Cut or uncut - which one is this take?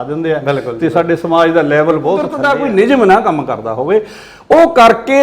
cut